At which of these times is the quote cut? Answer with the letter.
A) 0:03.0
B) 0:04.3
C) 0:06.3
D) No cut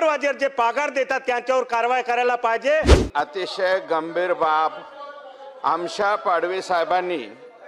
A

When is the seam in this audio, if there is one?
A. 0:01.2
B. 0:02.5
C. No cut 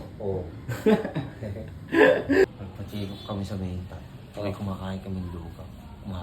B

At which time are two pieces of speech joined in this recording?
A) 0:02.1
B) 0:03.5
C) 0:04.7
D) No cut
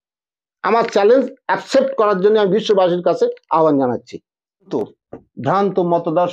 C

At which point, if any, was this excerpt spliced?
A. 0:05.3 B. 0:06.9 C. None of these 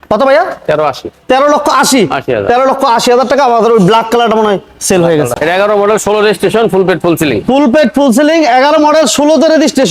A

